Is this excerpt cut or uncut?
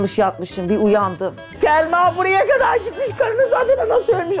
cut